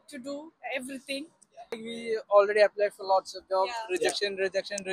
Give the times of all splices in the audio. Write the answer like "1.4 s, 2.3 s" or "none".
1.9 s